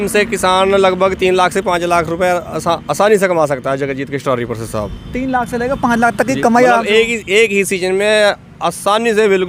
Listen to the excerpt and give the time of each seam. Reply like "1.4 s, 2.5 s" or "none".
none